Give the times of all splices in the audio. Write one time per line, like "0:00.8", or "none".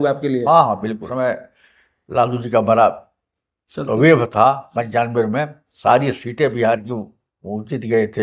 0:01.0